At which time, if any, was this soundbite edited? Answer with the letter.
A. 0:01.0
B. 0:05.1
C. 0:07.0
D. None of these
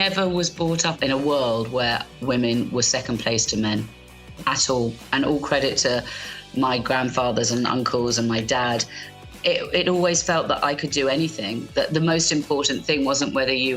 A